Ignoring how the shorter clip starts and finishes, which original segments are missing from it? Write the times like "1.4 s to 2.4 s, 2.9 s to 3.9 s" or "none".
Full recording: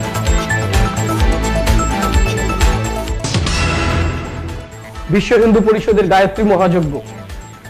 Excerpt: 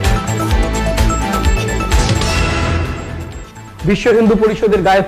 2.9 s to 3.5 s